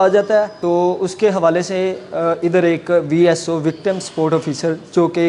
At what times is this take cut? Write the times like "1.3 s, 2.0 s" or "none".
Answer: none